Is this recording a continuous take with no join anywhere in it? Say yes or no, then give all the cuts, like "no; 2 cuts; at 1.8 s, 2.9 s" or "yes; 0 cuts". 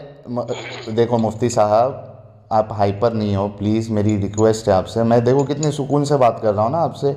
yes; 0 cuts